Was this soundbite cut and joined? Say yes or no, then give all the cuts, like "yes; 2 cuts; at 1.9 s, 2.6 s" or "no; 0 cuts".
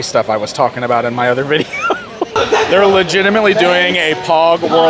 yes; 1 cut; at 2.4 s